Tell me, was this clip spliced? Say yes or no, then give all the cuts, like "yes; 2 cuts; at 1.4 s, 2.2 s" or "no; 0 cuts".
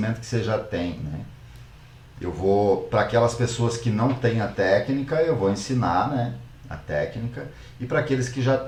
no; 0 cuts